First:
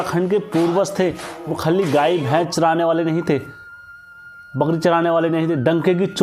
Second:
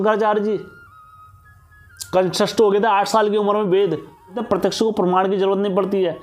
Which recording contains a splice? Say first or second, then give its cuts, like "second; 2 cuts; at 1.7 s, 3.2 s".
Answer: second; 1 cut; at 4.4 s